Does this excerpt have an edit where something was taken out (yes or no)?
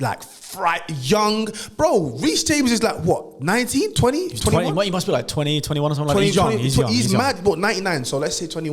no